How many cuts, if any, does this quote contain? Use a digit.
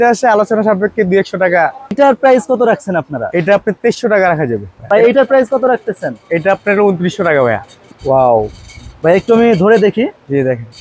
3